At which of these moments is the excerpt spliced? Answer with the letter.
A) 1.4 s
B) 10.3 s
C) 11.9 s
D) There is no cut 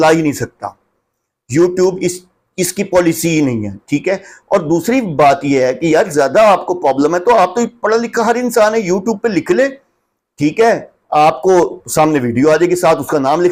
D